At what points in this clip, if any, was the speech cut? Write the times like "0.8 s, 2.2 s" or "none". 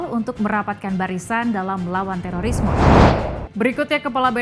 2.7 s